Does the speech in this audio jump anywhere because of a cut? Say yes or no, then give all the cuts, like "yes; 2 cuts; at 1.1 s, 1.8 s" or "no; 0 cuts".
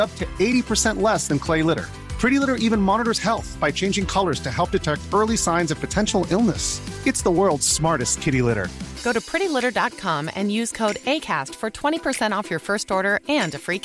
no; 0 cuts